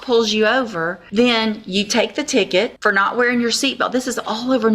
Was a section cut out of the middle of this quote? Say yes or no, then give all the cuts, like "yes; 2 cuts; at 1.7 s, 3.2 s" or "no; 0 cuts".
yes; 2 cuts; at 0.9 s, 2.8 s